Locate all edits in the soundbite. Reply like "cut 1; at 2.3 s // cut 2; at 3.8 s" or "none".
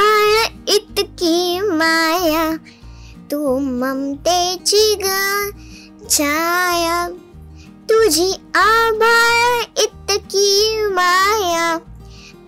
none

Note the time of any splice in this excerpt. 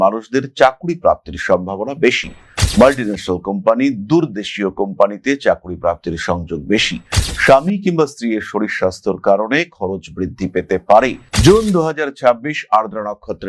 cut 1; at 11.2 s

